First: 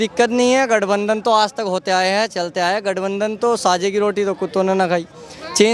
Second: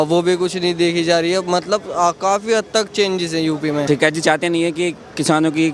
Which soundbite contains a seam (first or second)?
second